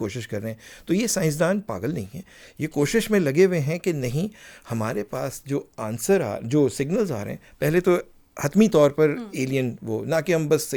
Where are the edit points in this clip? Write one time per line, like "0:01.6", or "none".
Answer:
none